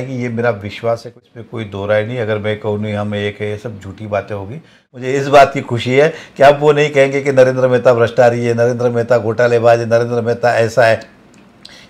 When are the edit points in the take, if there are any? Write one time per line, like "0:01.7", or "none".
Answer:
0:01.3
0:04.8